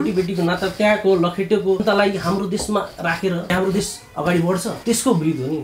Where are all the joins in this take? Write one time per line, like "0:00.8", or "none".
0:01.8
0:03.5
0:04.7